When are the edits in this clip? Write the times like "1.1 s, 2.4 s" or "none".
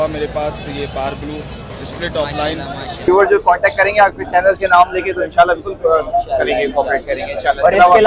3.1 s